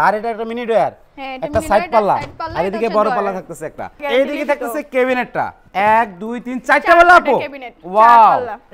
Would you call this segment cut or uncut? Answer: cut